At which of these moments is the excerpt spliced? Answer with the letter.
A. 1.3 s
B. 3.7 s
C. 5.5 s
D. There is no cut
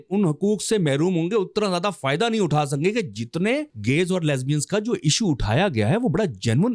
B